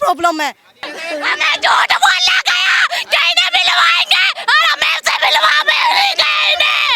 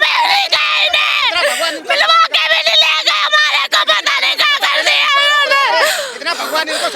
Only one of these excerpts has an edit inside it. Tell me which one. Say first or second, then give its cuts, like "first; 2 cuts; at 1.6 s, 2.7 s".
first; 1 cut; at 1.0 s